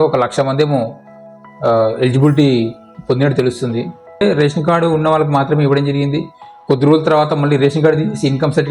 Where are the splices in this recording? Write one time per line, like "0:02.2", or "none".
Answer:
0:04.2